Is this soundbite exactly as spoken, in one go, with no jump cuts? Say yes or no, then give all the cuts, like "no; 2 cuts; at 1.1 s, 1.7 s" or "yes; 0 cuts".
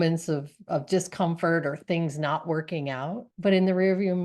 no; 1 cut; at 3.3 s